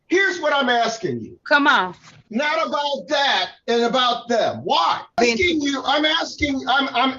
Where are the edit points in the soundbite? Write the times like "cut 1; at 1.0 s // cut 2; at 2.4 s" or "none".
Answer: cut 1; at 2.2 s // cut 2; at 5.1 s